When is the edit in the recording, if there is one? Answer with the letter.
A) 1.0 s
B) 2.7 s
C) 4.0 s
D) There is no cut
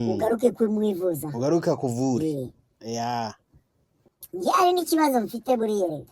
C